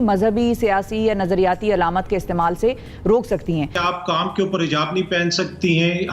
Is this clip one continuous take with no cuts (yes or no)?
no